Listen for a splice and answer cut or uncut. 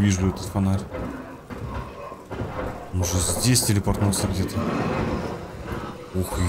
uncut